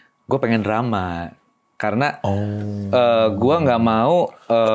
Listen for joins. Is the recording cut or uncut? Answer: uncut